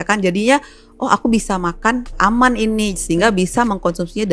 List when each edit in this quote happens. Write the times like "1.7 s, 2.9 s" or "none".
2.2 s

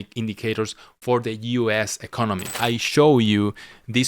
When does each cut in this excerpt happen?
2.5 s

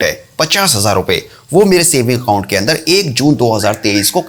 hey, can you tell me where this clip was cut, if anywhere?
none

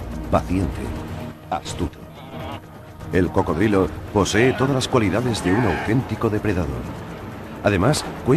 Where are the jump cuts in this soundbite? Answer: none

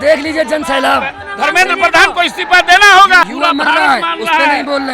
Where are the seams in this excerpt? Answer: 1.3 s, 3.2 s

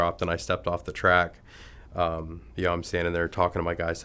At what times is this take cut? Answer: none

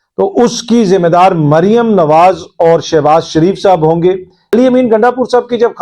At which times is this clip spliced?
4.5 s

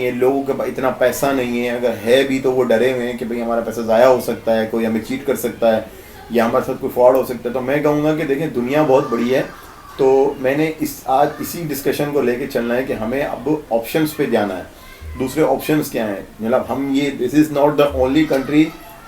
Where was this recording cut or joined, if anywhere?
none

